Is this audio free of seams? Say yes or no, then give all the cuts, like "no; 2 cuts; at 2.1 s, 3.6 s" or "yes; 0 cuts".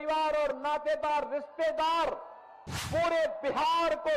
yes; 0 cuts